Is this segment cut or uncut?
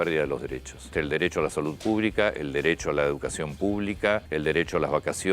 cut